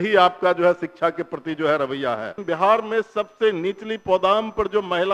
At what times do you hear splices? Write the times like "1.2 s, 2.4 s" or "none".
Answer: 2.4 s